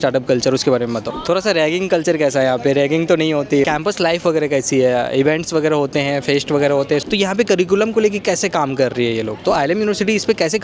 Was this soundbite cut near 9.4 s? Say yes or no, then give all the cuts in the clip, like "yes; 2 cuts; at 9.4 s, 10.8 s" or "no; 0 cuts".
yes; 4 cuts; at 1.1 s, 3.7 s, 7.0 s, 9.4 s